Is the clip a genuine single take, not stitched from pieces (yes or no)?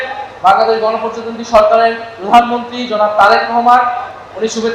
yes